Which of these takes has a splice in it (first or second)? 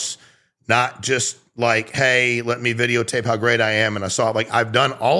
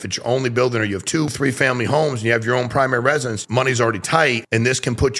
second